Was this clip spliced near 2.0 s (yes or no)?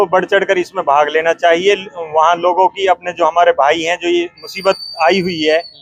no